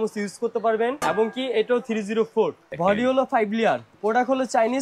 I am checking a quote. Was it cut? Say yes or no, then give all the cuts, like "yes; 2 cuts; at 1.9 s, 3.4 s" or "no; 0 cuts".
yes; 3 cuts; at 1.0 s, 2.6 s, 3.9 s